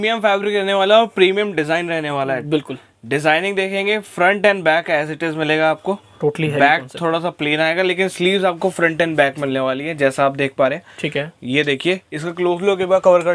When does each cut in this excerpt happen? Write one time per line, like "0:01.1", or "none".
none